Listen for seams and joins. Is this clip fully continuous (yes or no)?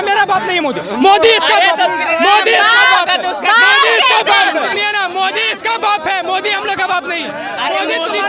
yes